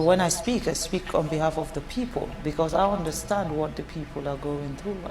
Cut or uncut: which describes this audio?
cut